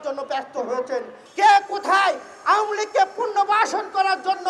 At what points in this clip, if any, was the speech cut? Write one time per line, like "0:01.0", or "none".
0:01.2